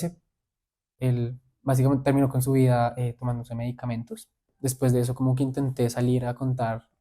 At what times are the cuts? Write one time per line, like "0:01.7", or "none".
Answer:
0:00.9
0:04.3